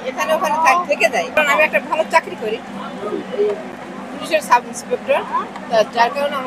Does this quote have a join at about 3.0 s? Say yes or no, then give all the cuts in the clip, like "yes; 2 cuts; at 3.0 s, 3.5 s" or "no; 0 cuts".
no; 1 cut; at 1.4 s